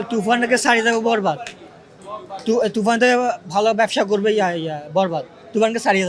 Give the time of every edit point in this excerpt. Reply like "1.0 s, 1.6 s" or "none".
none